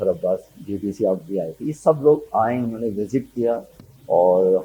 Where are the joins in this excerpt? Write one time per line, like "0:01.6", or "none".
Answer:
none